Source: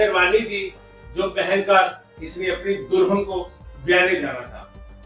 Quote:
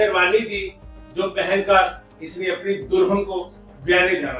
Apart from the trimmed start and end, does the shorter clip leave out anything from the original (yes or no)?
no